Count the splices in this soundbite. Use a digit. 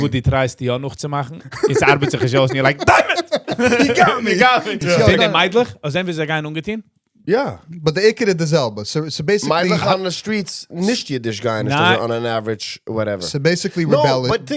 1